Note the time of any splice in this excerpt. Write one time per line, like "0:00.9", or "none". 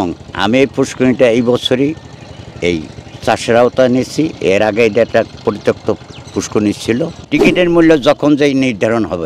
0:07.2